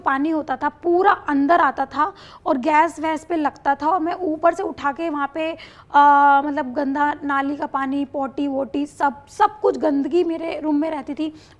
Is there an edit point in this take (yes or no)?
no